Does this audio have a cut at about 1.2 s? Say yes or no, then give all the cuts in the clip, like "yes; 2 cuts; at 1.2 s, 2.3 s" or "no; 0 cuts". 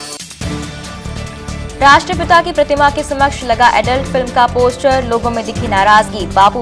yes; 1 cut; at 1.2 s